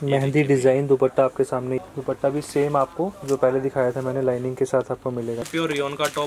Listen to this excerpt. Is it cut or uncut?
cut